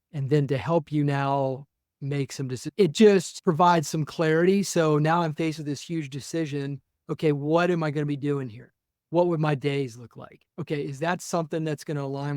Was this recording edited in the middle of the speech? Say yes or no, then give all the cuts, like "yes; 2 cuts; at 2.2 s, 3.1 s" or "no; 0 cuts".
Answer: yes; 1 cut; at 2.6 s